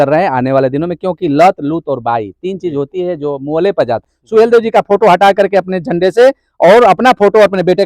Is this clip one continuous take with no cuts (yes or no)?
no